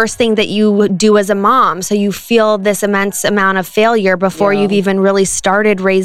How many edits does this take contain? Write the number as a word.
zero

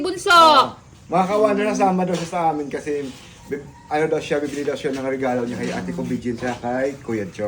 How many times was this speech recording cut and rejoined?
zero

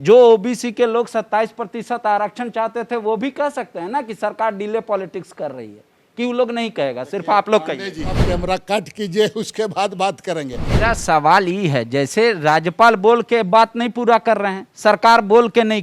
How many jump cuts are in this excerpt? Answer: two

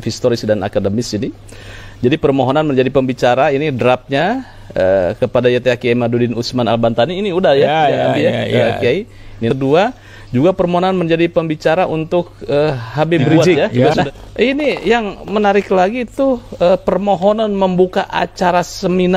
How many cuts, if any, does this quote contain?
two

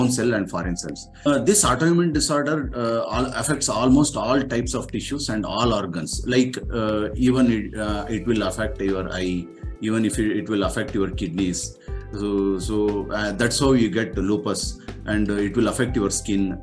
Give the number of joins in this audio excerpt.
one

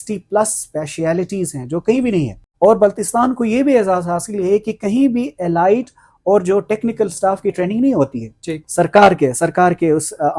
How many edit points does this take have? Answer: one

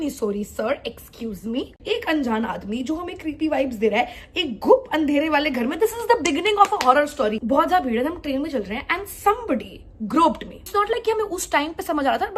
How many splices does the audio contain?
three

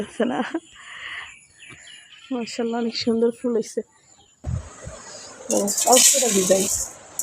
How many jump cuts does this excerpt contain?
one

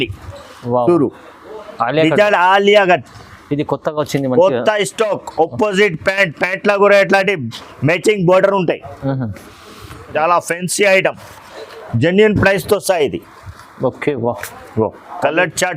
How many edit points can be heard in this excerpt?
one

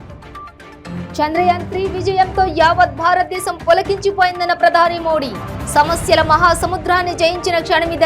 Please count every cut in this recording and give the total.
one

